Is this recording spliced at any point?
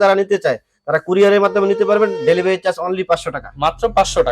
no; 0 cuts

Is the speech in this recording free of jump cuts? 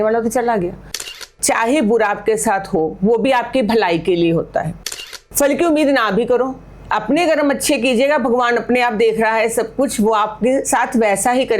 no; 2 cuts; at 1.3 s, 4.8 s

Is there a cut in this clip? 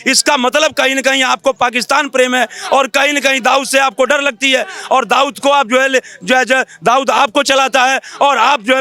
no; 0 cuts

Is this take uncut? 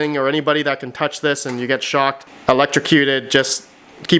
yes; 0 cuts

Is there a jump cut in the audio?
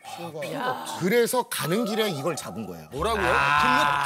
yes; 1 cut; at 0.9 s

